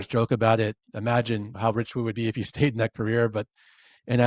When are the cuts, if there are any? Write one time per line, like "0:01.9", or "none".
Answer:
0:01.5